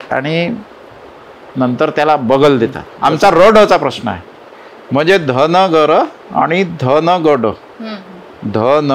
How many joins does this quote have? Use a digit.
1